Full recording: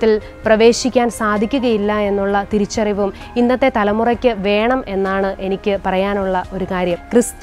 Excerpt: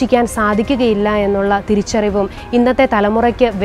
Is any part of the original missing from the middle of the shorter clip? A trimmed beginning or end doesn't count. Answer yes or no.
no